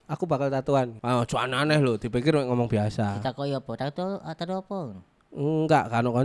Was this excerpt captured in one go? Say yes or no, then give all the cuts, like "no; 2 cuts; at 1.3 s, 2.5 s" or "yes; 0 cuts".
yes; 0 cuts